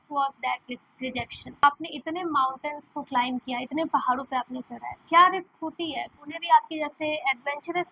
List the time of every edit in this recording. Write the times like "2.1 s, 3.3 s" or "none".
1.6 s, 6.2 s